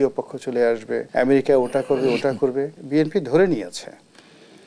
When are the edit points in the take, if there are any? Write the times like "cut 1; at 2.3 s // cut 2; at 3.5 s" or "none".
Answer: cut 1; at 1.1 s // cut 2; at 2.8 s